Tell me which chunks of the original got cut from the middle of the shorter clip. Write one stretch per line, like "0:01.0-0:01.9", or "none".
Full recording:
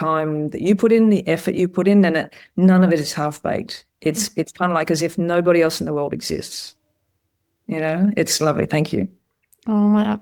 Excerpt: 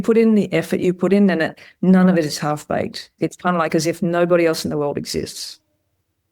0:03.8-0:04.2

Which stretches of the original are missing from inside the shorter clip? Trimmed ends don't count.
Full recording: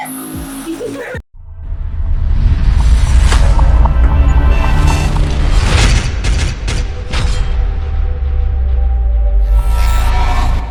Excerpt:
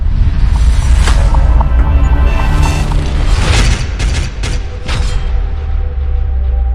none

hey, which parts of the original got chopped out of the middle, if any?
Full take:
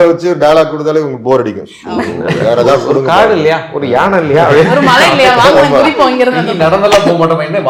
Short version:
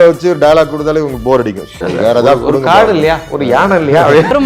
0:01.8-0:02.2

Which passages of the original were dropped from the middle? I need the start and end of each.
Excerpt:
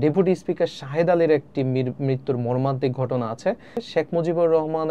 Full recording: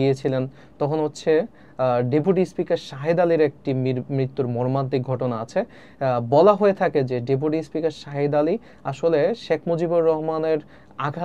0:05.9-0:09.4

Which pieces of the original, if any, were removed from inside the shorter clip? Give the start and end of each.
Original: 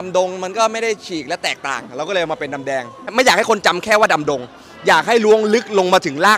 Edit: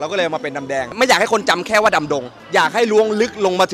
0:02.9-0:03.1
0:04.5-0:04.7

